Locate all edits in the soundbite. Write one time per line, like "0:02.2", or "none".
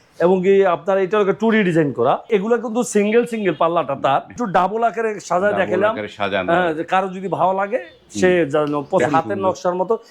0:02.3
0:04.4
0:09.0

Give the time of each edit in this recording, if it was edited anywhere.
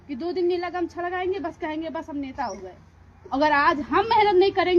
0:03.2

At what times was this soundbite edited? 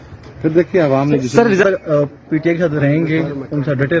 0:01.6

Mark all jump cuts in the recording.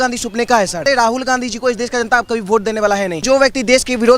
0:00.8
0:03.2

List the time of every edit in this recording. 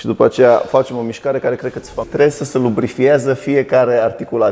0:01.9

